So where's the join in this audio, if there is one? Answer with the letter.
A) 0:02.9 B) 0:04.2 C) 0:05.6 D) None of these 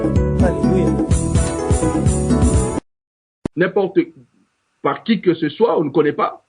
A